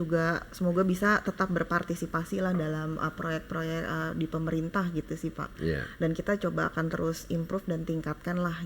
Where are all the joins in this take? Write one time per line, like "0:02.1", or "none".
none